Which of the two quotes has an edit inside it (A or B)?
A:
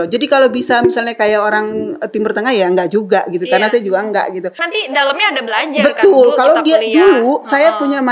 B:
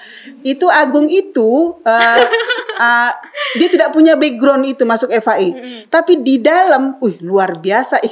A